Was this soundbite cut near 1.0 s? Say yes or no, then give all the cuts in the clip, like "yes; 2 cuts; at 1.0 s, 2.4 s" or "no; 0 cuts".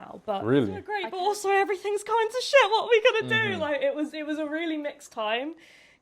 yes; 1 cut; at 1.0 s